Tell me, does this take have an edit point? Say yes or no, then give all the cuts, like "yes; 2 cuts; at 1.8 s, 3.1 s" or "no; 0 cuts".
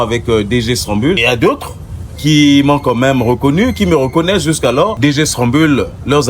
yes; 2 cuts; at 1.2 s, 4.9 s